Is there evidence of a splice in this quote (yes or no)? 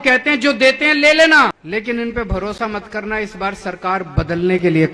yes